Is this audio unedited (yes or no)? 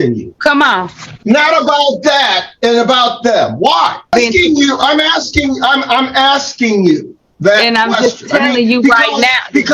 no